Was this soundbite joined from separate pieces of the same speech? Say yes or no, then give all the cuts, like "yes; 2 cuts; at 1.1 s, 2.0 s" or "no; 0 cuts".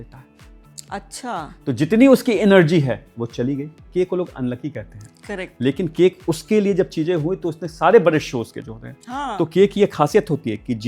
yes; 1 cut; at 3.8 s